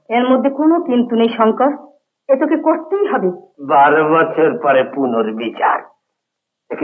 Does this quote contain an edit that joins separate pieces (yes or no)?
yes